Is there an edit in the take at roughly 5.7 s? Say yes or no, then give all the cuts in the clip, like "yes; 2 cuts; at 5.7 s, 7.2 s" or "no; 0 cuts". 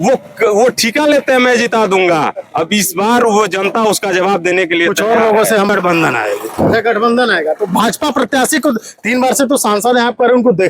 yes; 1 cut; at 5.7 s